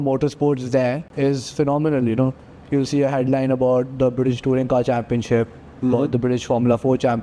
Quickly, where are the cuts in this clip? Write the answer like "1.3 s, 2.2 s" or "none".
1.1 s